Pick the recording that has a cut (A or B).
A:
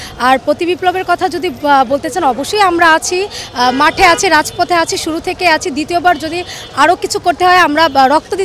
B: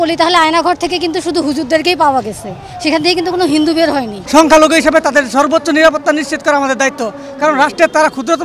B